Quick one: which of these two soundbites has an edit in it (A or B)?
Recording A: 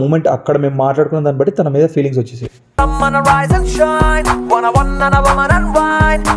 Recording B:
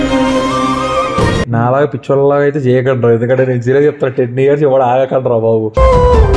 B